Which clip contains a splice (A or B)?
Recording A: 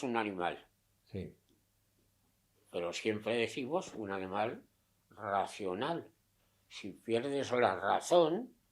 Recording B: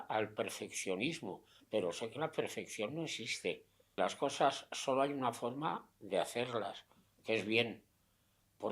B